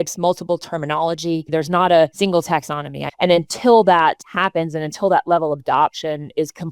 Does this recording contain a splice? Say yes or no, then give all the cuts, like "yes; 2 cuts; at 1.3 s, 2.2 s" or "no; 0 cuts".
yes; 3 cuts; at 1.5 s, 2.8 s, 4.3 s